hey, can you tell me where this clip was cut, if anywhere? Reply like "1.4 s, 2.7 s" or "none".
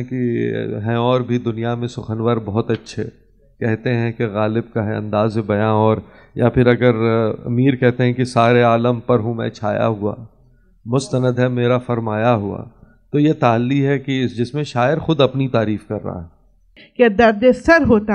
16.8 s